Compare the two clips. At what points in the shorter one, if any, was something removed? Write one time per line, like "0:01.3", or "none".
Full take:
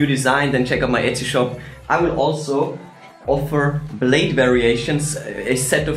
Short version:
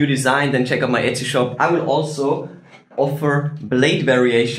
0:01.5